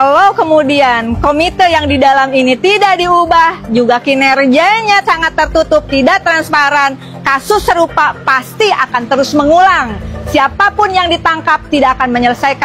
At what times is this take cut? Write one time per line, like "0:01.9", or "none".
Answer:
none